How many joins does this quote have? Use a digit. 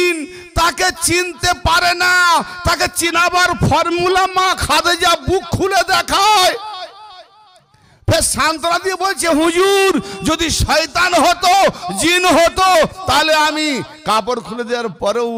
0